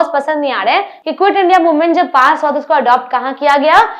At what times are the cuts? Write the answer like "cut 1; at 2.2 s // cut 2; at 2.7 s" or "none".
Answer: cut 1; at 0.9 s